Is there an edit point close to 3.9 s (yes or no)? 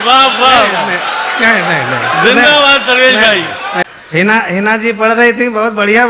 yes